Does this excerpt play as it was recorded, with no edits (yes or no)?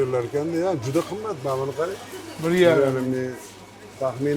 yes